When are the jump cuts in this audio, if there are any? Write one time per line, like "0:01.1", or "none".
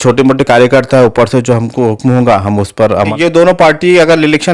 0:03.1